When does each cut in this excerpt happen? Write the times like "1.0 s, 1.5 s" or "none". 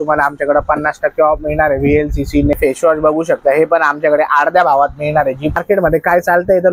2.5 s, 5.5 s